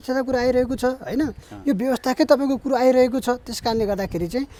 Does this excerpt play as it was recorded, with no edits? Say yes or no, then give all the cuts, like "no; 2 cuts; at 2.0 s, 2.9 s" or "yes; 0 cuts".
yes; 0 cuts